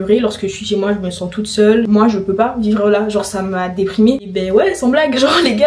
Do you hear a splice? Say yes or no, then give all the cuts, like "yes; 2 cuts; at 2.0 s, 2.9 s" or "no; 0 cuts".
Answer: yes; 2 cuts; at 1.9 s, 4.3 s